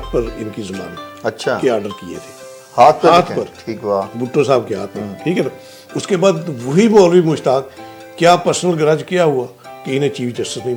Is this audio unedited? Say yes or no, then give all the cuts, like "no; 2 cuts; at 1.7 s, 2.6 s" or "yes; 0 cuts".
yes; 0 cuts